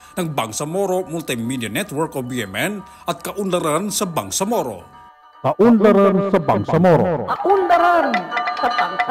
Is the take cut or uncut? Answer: uncut